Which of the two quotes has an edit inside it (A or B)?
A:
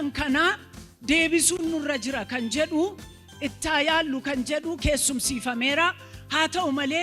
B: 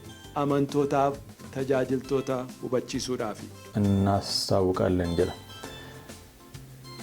B